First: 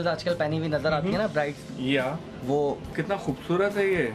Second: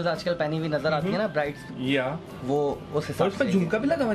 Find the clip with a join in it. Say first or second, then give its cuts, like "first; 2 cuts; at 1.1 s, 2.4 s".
first; 1 cut; at 2.9 s